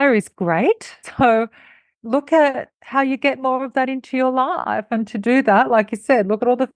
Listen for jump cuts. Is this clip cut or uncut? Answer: cut